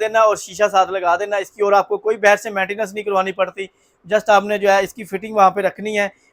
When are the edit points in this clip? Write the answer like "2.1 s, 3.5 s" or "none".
none